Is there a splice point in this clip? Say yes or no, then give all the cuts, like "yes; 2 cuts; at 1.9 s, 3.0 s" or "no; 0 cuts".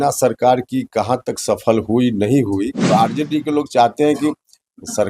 yes; 1 cut; at 2.8 s